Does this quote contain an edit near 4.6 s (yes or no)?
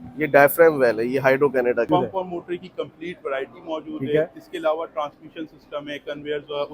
no